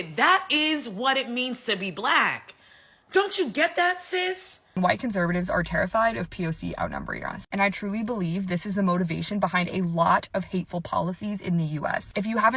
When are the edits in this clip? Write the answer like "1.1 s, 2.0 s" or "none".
4.7 s